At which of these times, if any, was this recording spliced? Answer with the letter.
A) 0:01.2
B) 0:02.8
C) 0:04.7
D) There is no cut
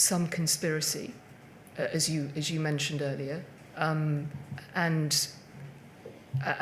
D